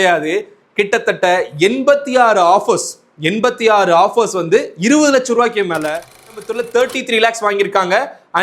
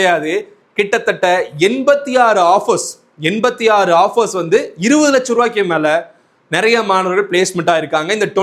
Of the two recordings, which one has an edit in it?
first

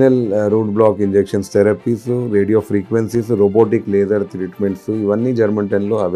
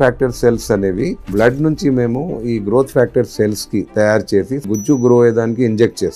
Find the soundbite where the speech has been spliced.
second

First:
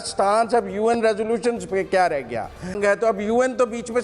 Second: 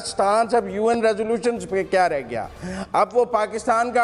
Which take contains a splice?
first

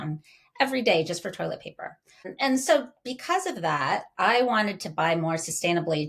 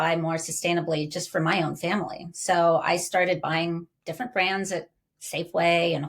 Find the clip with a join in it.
first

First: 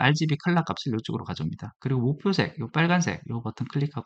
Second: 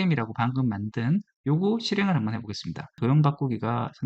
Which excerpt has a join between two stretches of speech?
second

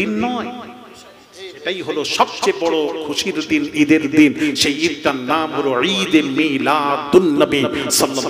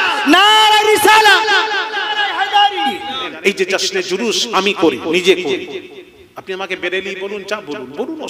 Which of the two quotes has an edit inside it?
second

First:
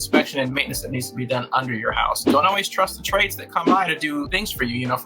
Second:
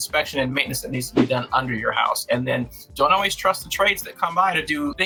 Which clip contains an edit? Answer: first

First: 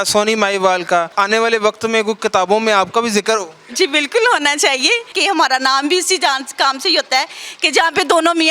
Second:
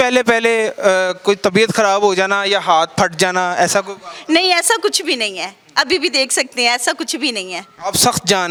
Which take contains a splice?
first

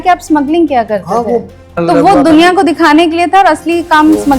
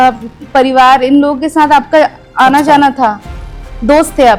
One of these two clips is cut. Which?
first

